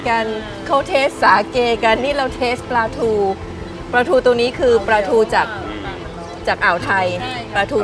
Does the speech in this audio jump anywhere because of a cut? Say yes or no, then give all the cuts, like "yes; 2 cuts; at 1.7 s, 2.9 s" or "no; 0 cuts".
no; 0 cuts